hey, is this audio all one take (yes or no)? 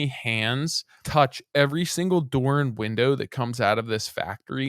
no